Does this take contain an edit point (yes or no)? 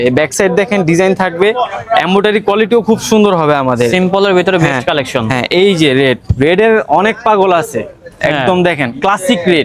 no